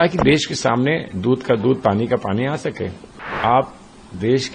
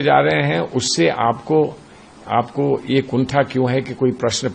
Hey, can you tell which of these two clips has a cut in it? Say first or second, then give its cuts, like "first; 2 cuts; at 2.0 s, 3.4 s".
first; 1 cut; at 3.3 s